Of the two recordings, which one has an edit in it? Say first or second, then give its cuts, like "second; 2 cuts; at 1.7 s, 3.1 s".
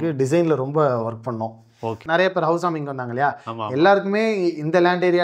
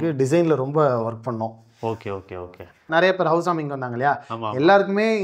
first; 1 cut; at 2.0 s